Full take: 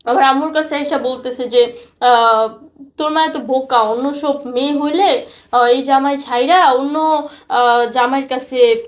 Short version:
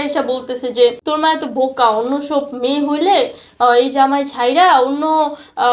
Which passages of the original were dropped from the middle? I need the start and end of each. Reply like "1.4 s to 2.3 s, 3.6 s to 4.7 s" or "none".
1.8 s to 2.9 s